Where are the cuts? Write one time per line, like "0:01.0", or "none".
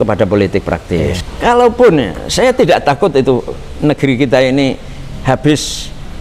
0:01.2

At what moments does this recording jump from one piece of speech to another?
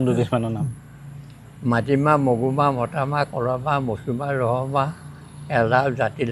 none

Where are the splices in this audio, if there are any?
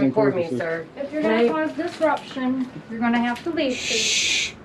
none

